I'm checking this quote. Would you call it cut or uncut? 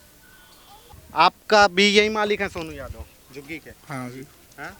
cut